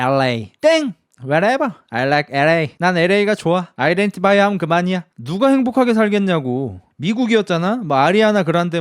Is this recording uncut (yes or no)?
no